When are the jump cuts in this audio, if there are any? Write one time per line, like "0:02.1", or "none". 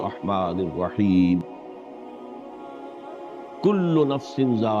0:02.0
0:03.6